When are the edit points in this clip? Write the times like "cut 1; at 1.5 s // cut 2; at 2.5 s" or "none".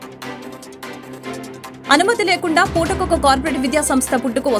none